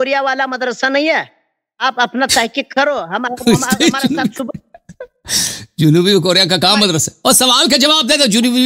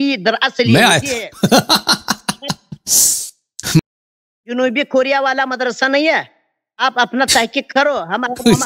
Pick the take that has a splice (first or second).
second